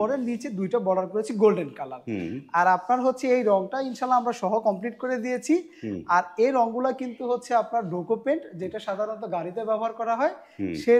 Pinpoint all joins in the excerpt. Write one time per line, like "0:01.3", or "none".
none